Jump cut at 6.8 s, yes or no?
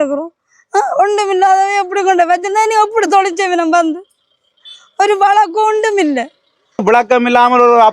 yes